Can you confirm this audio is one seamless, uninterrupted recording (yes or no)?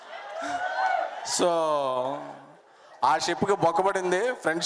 yes